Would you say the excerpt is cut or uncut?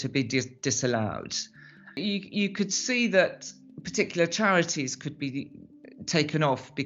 cut